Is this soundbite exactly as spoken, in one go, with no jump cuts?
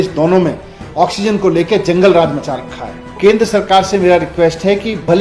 no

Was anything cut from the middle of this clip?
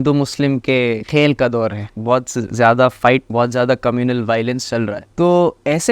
yes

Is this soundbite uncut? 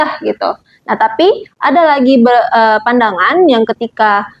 yes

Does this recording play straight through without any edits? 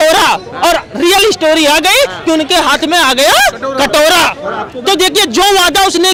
yes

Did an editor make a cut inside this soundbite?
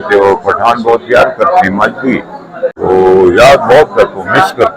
yes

